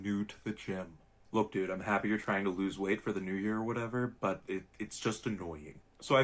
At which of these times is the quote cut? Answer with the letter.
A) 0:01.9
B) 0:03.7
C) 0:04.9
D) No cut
A